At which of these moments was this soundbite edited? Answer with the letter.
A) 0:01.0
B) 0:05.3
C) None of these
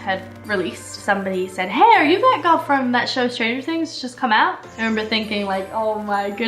A